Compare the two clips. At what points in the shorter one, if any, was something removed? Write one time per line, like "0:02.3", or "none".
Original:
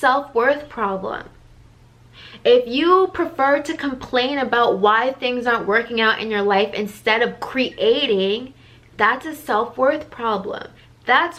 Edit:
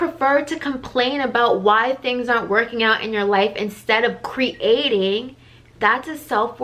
none